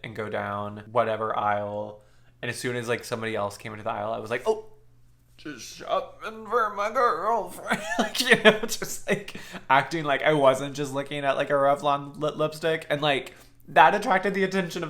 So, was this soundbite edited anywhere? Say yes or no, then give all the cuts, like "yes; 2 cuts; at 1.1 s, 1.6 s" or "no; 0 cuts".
no; 0 cuts